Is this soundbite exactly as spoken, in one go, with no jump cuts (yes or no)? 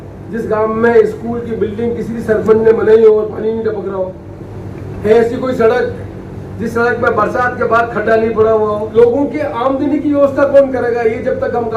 no